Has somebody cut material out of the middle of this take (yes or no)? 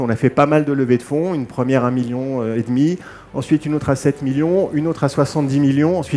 no